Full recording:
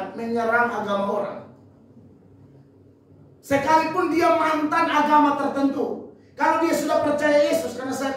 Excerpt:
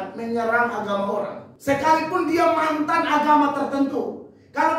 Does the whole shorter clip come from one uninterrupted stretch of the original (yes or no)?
no